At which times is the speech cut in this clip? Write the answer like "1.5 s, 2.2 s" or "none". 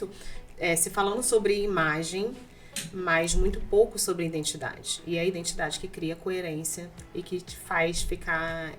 none